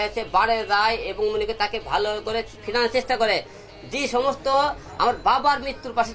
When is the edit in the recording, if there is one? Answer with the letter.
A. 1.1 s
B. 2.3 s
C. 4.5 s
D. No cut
A